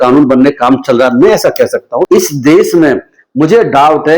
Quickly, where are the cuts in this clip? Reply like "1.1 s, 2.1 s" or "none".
2.1 s